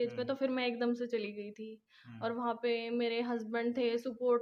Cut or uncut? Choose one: uncut